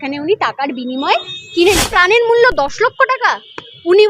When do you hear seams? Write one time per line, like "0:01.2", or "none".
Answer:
0:01.9